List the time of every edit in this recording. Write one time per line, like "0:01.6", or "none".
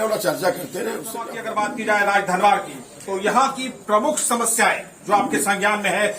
0:01.4